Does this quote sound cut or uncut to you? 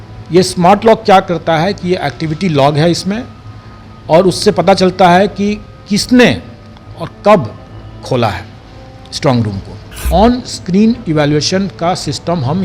cut